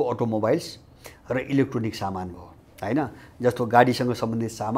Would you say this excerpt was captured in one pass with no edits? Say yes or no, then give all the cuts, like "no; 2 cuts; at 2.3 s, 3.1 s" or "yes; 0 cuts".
yes; 0 cuts